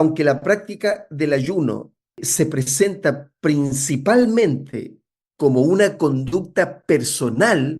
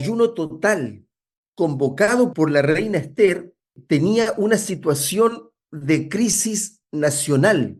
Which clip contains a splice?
first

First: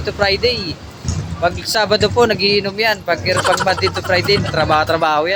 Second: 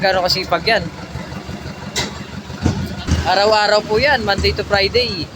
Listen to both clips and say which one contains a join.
second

